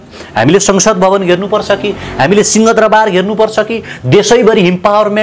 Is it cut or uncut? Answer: uncut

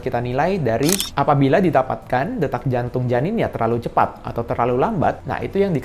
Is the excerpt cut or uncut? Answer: cut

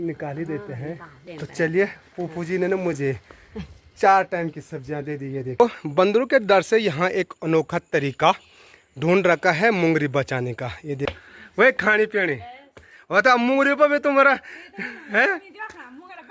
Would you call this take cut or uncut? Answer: cut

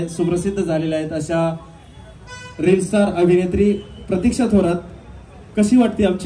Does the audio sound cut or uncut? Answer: uncut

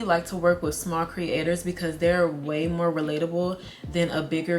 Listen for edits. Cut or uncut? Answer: uncut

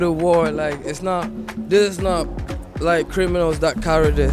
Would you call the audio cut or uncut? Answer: uncut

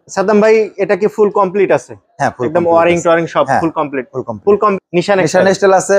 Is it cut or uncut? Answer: cut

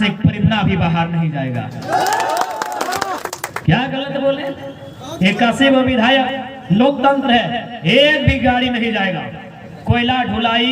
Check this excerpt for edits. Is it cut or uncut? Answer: cut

